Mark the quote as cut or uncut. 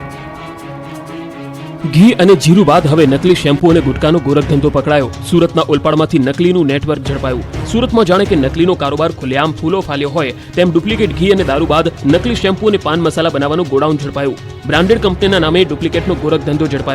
cut